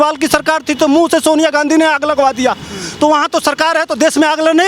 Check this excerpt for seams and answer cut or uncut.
uncut